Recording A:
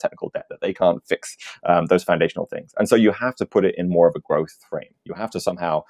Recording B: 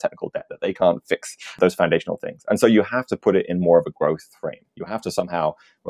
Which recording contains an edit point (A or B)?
B